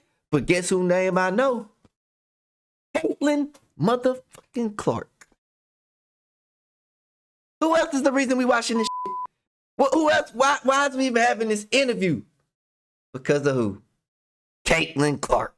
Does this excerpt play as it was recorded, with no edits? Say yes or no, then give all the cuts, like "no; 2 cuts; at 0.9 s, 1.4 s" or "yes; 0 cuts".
yes; 0 cuts